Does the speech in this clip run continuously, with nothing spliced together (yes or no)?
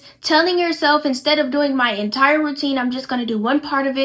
yes